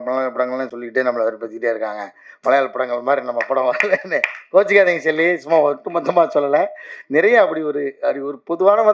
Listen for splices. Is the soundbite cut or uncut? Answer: uncut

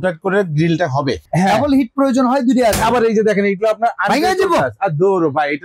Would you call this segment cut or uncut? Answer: cut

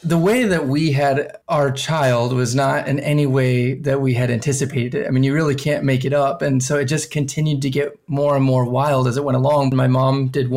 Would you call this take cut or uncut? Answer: cut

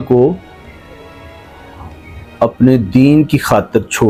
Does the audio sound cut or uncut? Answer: uncut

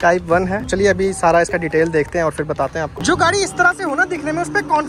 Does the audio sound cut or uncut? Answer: cut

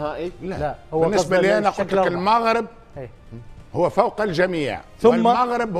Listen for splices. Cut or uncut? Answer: uncut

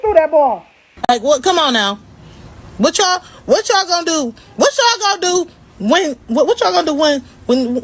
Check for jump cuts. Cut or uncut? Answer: cut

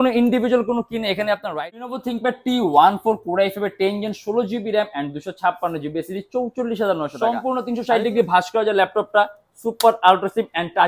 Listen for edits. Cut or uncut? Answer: cut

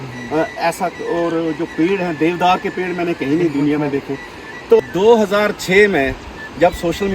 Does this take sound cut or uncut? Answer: cut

